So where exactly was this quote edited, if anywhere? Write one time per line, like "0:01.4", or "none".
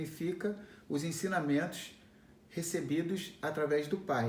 none